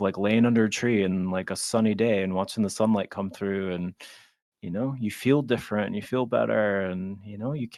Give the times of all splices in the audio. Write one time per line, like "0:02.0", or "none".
none